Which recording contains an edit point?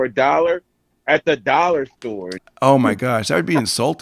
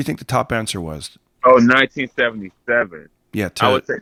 first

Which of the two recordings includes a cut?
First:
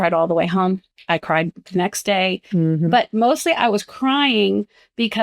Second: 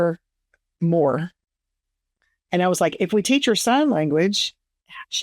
first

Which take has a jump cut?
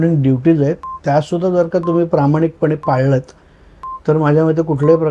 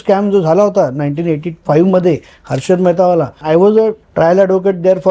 second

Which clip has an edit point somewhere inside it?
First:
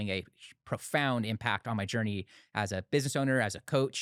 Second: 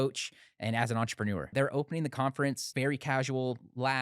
second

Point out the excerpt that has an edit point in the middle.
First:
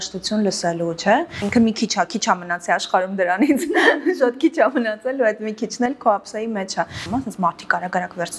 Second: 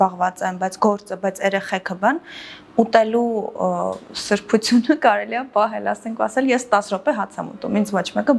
first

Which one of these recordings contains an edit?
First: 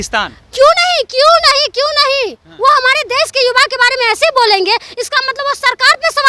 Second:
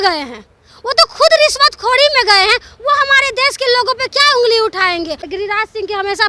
second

